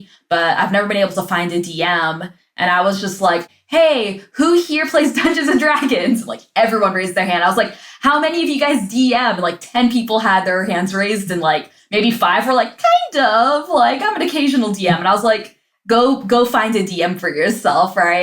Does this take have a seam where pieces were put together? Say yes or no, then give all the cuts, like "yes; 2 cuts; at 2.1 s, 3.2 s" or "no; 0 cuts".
yes; 1 cut; at 3.5 s